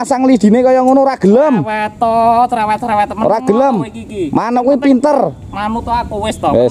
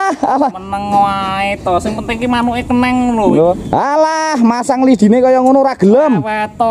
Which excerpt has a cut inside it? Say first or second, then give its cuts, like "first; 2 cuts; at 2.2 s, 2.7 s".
second; 1 cut; at 3.6 s